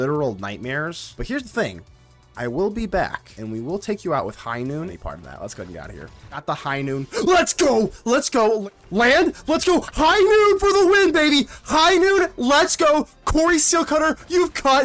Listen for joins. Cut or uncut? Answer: cut